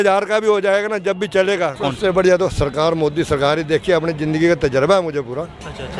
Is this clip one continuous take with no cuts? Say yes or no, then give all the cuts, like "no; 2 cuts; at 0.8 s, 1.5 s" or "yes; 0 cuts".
no; 1 cut; at 1.8 s